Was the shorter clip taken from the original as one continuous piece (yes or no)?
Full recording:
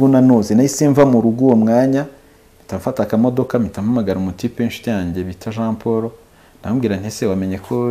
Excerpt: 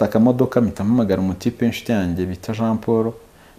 yes